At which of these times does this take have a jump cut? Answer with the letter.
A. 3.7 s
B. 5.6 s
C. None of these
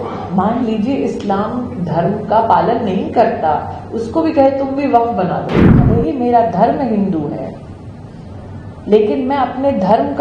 B